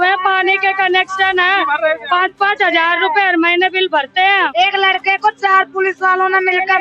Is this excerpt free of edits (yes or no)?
no